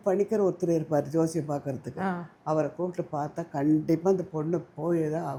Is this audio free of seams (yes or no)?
yes